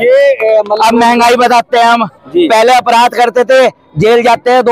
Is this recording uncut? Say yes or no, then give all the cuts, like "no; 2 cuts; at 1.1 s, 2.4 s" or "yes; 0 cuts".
yes; 0 cuts